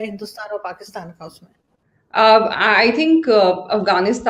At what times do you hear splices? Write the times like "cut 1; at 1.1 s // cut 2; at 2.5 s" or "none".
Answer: none